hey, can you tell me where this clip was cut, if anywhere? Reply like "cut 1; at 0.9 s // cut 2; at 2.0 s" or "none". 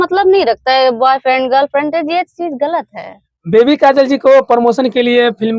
none

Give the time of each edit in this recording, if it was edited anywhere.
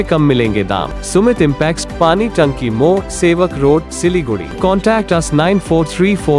cut 1; at 0.9 s // cut 2; at 4.5 s

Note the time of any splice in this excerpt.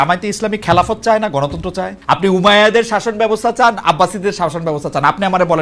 cut 1; at 2.2 s

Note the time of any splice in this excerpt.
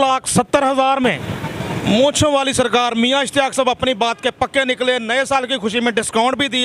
cut 1; at 1.3 s

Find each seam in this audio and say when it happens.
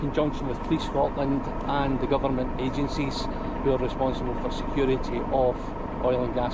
none

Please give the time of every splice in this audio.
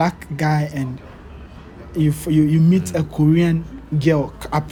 none

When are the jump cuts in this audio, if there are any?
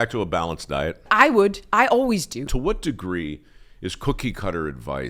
cut 1; at 1.1 s // cut 2; at 2.5 s

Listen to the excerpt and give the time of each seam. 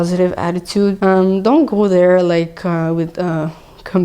cut 1; at 1.0 s

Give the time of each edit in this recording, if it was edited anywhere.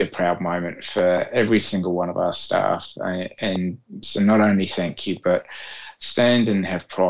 none

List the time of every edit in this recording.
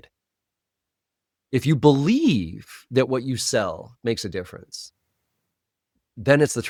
none

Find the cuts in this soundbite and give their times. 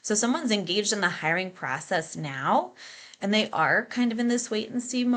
none

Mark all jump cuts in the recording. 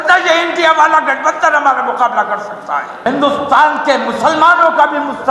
cut 1; at 2.9 s

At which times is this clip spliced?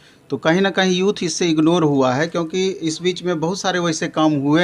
none

